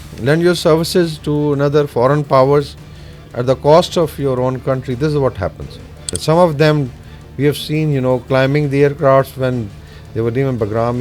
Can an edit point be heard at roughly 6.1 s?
yes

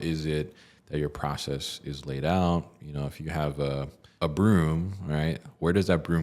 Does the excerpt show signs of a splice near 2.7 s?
no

